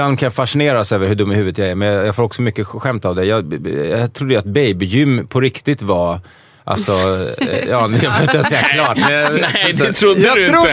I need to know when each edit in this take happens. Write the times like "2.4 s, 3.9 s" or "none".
none